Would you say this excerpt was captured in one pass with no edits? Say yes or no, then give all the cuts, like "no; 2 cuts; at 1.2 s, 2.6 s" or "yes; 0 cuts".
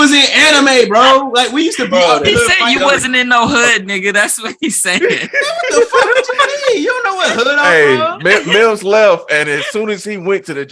yes; 0 cuts